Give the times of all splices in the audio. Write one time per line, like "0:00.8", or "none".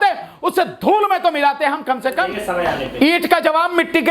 0:02.4